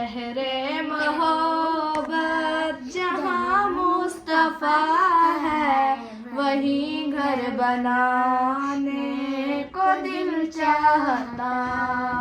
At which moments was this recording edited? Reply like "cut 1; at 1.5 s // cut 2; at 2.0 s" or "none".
none